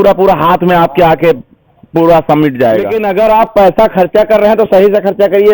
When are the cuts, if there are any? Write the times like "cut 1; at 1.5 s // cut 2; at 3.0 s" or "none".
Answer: cut 1; at 2.9 s